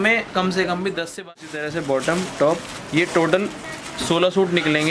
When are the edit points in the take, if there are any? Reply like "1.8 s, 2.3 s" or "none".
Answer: 1.1 s